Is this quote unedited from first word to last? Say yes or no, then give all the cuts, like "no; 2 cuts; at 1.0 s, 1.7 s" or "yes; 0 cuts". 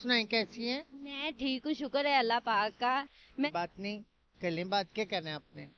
no; 1 cut; at 3.5 s